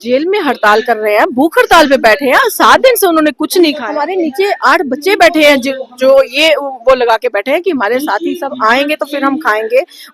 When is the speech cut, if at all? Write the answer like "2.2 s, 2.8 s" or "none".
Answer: 3.8 s